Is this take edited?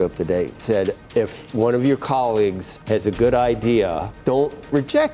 yes; 3 cuts; at 1.0 s, 2.7 s, 4.1 s

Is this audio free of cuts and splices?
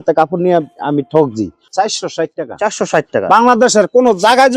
no; 1 cut; at 1.6 s

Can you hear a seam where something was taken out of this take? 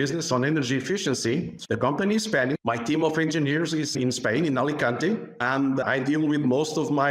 yes; 2 cuts; at 1.6 s, 5.3 s

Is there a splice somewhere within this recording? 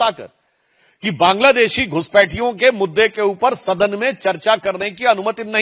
no; 0 cuts

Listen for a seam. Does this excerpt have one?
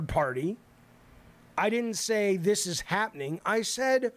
no; 0 cuts

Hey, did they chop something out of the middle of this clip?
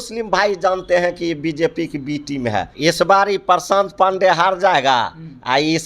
yes; 1 cut; at 2.7 s

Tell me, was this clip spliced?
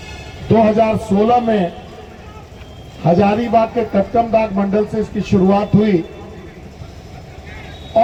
no; 0 cuts

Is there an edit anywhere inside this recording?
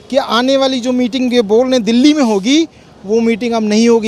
no; 0 cuts

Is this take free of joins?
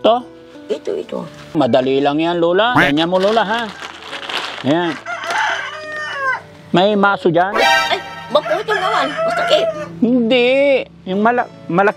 no; 3 cuts; at 1.5 s, 2.8 s, 7.7 s

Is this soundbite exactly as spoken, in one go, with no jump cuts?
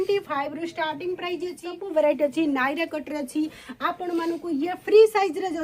no; 1 cut; at 1.6 s

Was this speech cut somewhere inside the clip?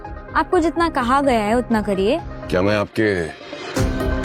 yes; 1 cut; at 2.3 s

